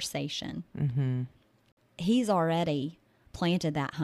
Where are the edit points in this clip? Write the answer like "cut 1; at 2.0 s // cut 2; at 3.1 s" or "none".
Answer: cut 1; at 1.6 s